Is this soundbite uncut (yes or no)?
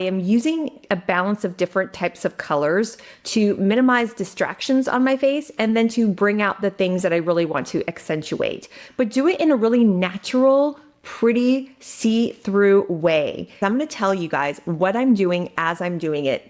no